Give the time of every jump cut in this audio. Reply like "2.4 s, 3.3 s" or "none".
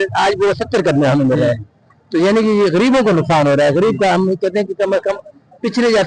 none